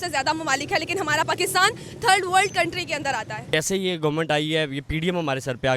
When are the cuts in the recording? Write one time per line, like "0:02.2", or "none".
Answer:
0:03.5